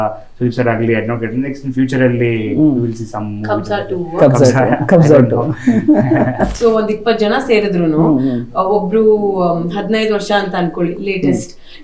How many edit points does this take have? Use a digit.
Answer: 1